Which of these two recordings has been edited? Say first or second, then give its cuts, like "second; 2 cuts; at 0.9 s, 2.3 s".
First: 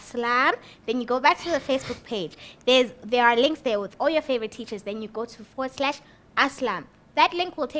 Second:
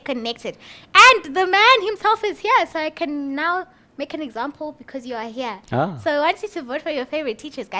second; 1 cut; at 3.6 s